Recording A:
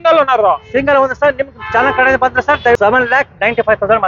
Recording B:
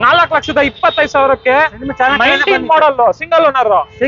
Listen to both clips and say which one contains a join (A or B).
A